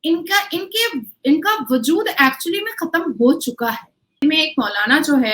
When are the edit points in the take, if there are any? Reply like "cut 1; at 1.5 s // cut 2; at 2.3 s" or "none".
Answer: cut 1; at 4.2 s